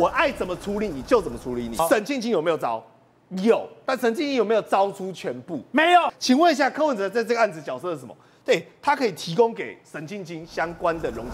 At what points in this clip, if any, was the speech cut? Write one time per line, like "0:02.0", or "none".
0:01.8
0:06.1